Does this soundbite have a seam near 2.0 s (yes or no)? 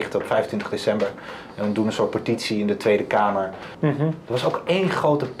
no